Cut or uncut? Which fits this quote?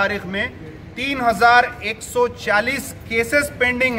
uncut